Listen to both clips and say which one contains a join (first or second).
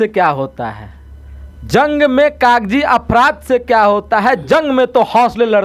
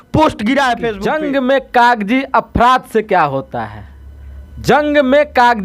second